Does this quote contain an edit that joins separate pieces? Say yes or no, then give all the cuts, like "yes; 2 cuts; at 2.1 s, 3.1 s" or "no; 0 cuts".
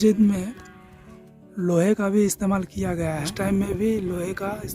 yes; 1 cut; at 3.3 s